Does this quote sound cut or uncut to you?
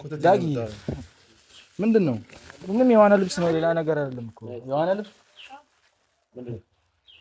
uncut